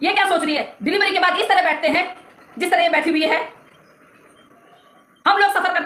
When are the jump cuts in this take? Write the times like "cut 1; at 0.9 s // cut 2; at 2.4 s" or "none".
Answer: none